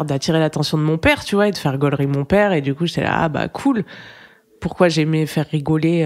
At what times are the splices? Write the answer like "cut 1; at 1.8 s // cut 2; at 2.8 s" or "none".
none